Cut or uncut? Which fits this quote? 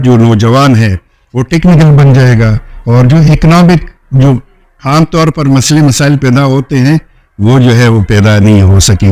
uncut